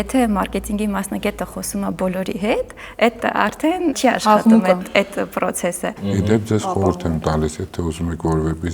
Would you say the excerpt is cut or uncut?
cut